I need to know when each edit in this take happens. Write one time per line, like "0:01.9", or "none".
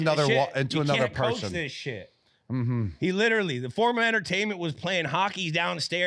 none